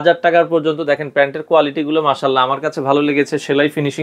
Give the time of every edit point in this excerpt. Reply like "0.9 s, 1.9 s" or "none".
none